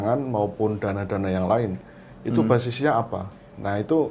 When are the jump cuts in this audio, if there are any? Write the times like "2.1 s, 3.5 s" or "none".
none